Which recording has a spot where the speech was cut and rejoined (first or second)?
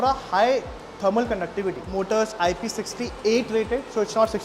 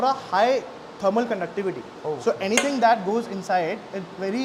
first